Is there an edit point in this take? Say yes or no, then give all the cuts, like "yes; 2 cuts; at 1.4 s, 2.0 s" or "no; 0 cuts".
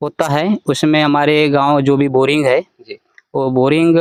no; 0 cuts